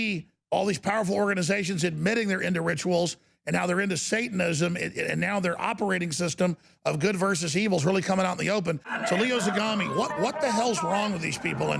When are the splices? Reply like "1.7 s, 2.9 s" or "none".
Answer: 8.9 s

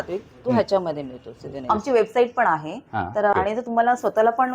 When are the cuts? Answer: 1.7 s, 3.3 s

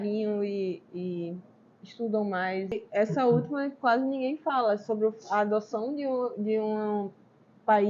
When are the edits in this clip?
2.8 s

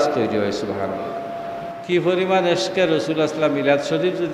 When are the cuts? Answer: 1.8 s

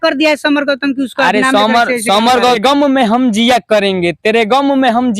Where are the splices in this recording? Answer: 2.4 s

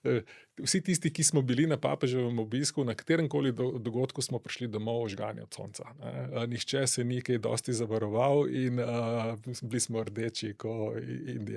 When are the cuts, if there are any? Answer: none

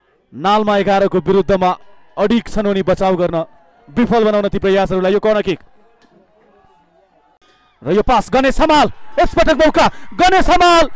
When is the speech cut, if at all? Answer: 7.4 s

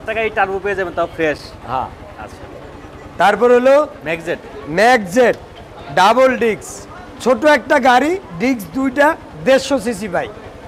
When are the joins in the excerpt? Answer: none

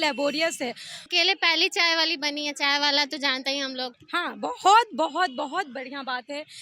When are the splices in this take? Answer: 1.1 s, 4.0 s

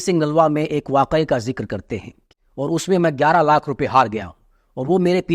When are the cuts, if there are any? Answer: 2.2 s

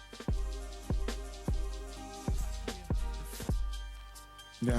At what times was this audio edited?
1.1 s

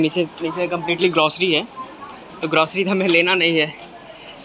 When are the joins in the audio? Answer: none

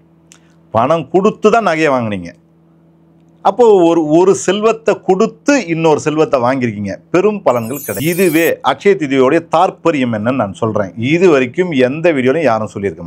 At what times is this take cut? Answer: 7.9 s

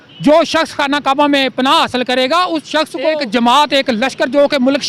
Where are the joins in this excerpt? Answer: 3.1 s

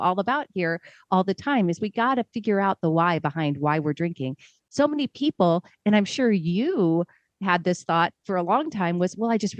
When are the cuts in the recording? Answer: none

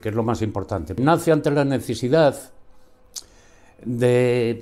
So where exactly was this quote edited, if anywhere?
1.0 s

